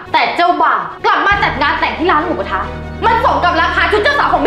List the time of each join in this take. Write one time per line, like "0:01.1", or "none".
0:00.9